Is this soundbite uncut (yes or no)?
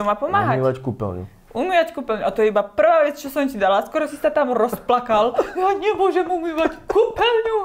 yes